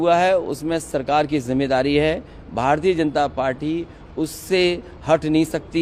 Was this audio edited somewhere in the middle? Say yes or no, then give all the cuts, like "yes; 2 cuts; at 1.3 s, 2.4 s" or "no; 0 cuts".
no; 0 cuts